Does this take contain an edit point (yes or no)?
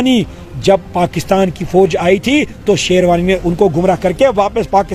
no